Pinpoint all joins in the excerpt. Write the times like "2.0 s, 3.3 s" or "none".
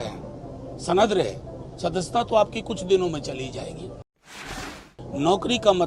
4.4 s